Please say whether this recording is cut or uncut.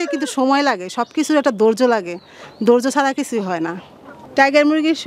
cut